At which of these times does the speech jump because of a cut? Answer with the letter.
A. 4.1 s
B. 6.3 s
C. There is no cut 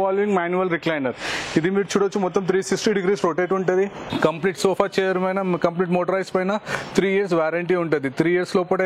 A